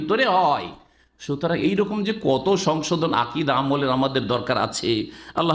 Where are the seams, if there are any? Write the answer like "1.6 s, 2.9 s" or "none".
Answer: none